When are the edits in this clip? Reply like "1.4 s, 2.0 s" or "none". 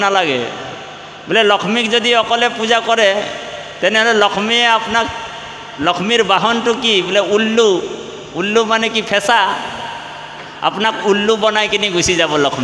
none